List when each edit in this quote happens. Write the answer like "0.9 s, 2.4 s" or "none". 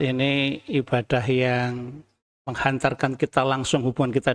none